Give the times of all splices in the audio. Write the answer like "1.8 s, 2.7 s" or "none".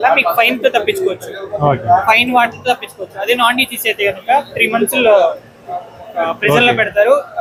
none